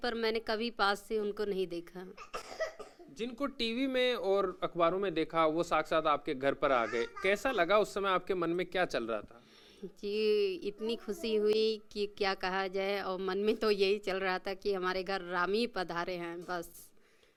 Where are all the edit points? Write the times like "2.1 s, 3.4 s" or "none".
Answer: none